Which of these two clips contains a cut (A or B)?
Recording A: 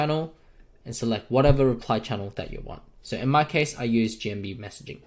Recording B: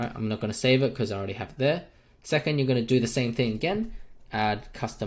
A